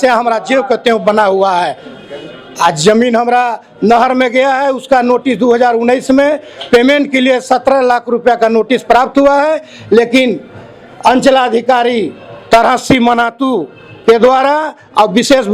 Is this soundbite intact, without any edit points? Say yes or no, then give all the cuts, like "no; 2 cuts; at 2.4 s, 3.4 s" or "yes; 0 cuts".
yes; 0 cuts